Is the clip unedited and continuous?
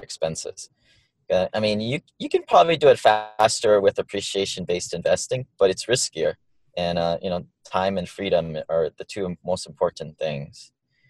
no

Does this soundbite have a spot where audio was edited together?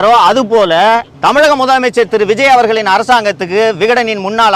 yes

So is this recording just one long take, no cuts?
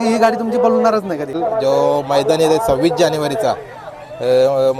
no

